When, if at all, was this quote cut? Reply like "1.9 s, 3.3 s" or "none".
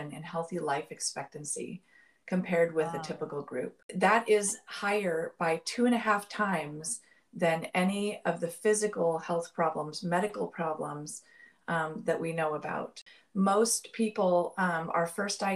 3.8 s, 13.1 s